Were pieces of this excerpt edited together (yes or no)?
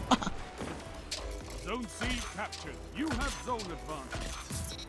no